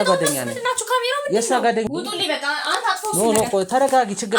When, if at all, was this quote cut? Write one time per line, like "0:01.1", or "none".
0:01.9